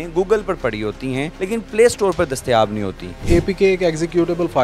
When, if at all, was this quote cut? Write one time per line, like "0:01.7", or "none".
0:01.3
0:03.2